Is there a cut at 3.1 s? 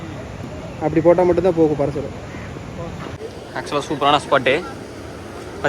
yes; 1 cut; at 3.1 s

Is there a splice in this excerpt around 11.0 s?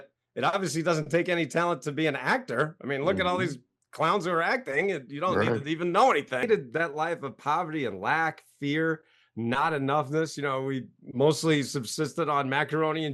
no; 1 cut; at 6.4 s

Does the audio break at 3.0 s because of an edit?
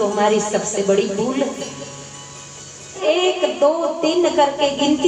yes; 1 cut; at 3.0 s

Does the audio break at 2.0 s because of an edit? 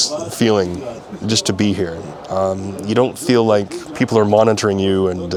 no; 0 cuts

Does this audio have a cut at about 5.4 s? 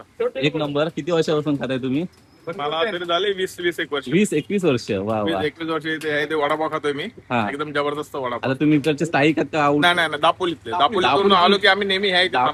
no; 0 cuts

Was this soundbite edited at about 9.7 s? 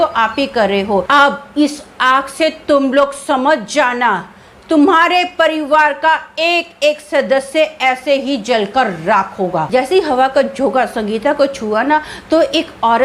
yes; 2 cuts; at 1.1 s, 9.7 s

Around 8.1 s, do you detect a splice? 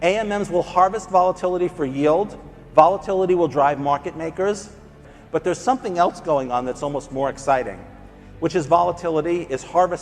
no; 1 cut; at 5.0 s

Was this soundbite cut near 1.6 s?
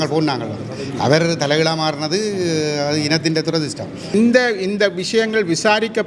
no; 1 cut; at 4.1 s

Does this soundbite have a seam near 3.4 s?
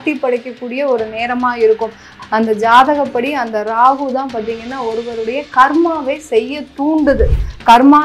no; 1 cut; at 2.1 s

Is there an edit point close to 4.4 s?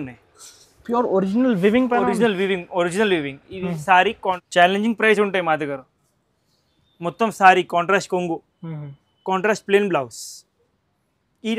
yes; 1 cut; at 4.4 s

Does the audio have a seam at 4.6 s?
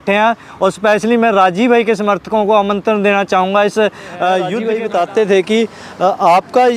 yes; 1 cut; at 4.6 s

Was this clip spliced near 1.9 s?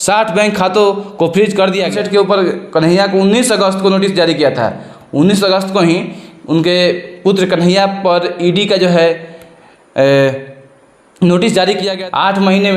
yes; 2 cuts; at 1.9 s, 11.9 s

